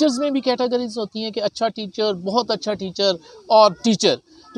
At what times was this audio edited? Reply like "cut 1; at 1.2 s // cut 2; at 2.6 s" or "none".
none